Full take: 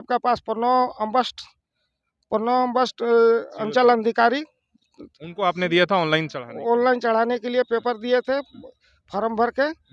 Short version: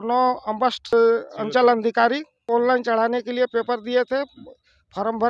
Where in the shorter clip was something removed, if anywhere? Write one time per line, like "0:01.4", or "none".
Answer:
0:00.9
0:02.3